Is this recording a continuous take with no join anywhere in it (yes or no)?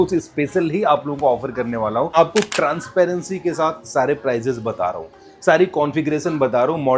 no